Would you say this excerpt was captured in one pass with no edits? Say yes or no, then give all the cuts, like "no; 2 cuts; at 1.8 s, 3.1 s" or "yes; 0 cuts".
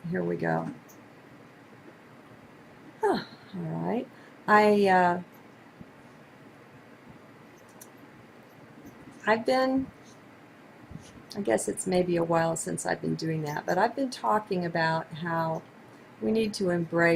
yes; 0 cuts